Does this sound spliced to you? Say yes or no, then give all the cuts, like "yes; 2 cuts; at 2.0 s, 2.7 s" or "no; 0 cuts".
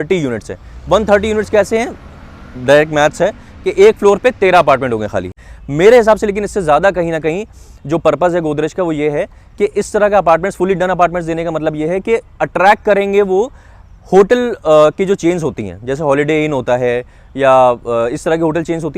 yes; 1 cut; at 5.3 s